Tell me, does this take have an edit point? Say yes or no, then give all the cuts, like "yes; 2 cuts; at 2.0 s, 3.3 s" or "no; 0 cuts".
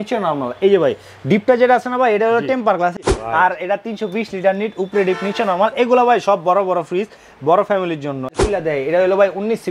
yes; 2 cuts; at 3.0 s, 8.3 s